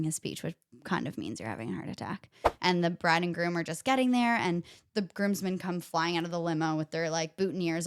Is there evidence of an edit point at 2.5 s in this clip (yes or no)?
yes